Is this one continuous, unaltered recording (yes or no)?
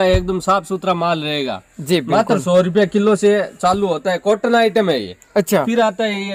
yes